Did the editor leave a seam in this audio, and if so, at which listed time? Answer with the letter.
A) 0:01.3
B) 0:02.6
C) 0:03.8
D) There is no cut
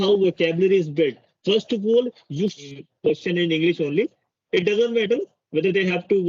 B